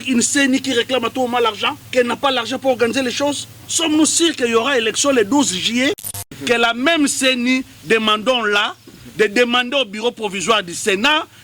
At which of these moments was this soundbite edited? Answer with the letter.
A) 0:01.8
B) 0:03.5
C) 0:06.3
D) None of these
C